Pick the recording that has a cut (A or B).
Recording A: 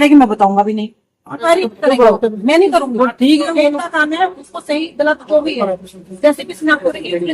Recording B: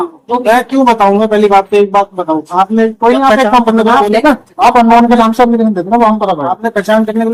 A